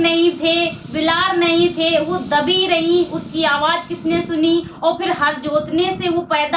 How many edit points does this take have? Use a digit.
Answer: 0